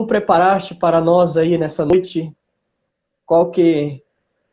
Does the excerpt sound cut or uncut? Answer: cut